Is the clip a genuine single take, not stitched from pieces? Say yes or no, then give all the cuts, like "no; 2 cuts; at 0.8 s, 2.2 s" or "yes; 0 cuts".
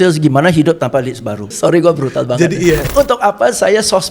no; 2 cuts; at 1.6 s, 2.9 s